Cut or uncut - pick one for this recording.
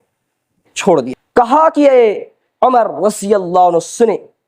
cut